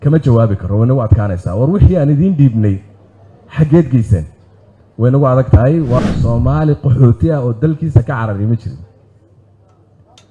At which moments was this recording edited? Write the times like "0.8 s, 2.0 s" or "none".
6.0 s